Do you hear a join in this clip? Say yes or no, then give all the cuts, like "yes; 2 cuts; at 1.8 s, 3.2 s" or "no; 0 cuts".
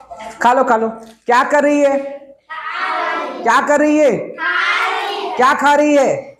no; 0 cuts